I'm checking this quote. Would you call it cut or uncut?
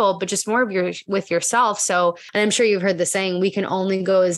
cut